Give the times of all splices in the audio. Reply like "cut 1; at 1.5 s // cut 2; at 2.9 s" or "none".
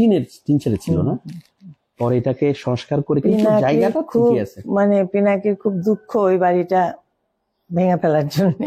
none